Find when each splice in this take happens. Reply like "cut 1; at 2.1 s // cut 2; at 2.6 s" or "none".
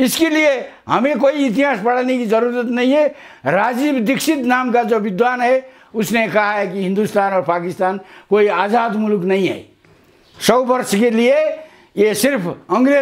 none